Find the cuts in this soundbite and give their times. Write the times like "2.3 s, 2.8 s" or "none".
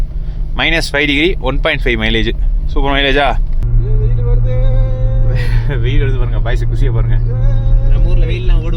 3.6 s

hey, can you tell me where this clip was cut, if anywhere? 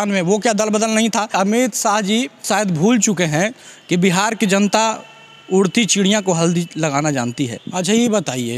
1.3 s, 2.4 s, 7.6 s

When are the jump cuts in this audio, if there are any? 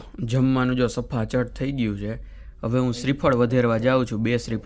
none

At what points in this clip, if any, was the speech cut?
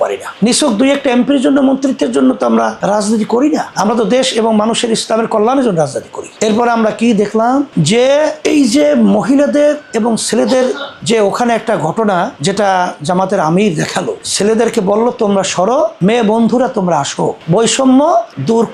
none

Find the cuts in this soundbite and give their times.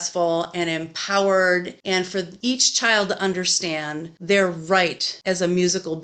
none

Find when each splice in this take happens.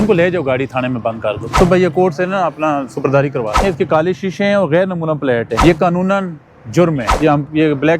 1.5 s, 3.6 s, 5.5 s, 7.1 s

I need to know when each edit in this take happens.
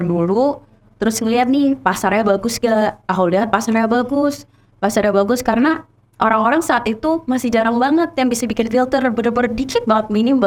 none

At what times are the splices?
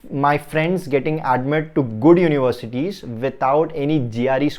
none

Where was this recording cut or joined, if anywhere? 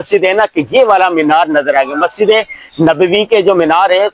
none

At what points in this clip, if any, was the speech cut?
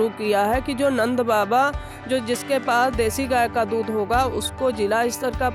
none

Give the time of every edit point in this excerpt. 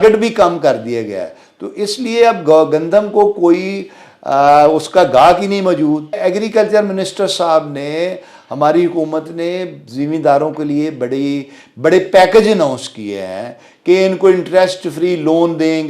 6.2 s

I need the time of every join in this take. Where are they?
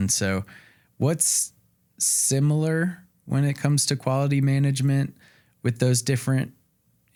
none

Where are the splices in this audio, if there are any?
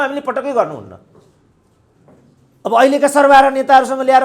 1.9 s

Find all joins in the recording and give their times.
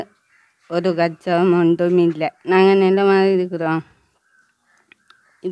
2.4 s

